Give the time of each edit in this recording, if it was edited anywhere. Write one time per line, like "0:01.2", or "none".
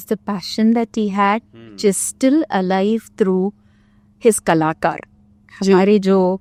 none